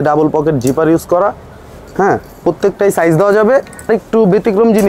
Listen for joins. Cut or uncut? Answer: cut